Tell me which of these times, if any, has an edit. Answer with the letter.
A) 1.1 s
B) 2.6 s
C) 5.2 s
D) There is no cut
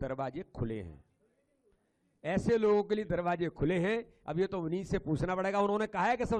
D